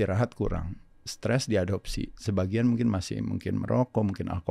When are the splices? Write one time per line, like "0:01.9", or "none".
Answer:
none